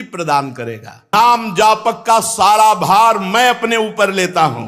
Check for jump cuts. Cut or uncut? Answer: cut